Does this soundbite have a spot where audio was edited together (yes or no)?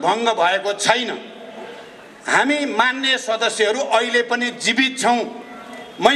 no